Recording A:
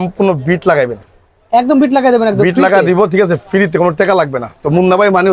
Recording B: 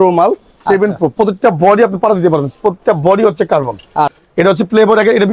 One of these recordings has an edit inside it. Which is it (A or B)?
B